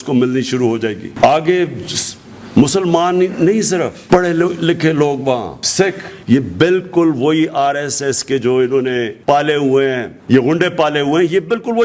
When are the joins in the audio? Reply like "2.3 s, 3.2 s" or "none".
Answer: 6.1 s, 9.1 s, 10.1 s